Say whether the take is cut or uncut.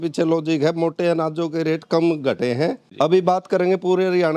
cut